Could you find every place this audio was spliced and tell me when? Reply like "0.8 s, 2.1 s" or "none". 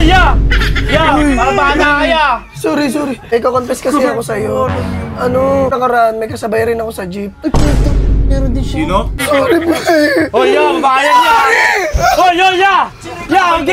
3.2 s, 5.7 s, 9.2 s